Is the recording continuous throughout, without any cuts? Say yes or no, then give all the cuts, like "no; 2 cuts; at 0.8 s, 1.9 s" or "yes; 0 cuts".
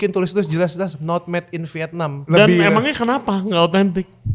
no; 1 cut; at 2.2 s